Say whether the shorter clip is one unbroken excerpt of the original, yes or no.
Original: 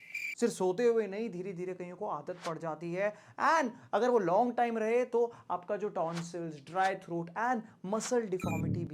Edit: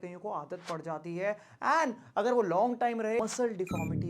no